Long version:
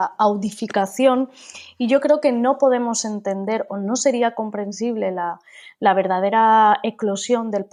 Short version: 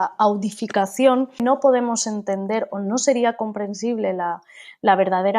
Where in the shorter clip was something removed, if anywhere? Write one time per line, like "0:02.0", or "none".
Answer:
0:01.4